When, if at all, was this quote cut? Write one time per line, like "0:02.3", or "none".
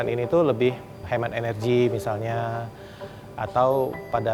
0:01.0